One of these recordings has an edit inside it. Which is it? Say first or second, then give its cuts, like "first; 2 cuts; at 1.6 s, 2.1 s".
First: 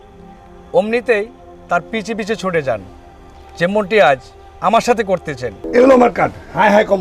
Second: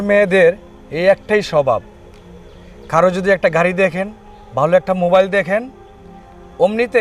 first; 1 cut; at 5.6 s